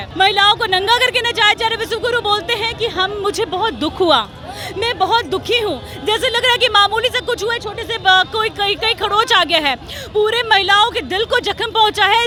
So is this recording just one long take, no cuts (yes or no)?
yes